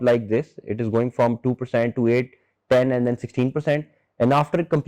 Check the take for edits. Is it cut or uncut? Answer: uncut